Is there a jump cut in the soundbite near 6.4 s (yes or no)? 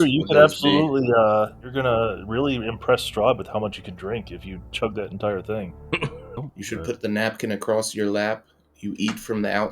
yes